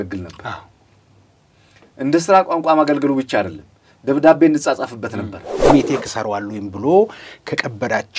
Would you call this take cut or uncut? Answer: cut